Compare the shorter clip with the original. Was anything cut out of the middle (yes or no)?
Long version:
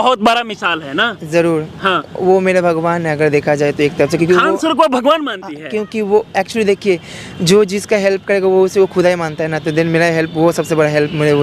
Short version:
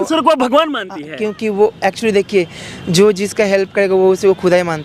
no